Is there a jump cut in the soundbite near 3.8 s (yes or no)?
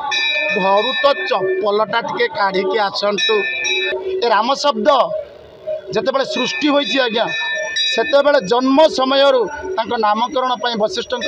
yes